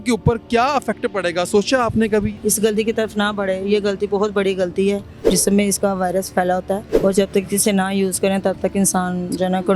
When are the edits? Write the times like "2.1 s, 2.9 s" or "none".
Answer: 2.4 s, 5.2 s, 6.9 s